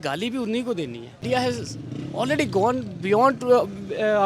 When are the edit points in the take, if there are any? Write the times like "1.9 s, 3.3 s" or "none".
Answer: 1.2 s